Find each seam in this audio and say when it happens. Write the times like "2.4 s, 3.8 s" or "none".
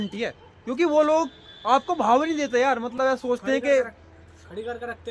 none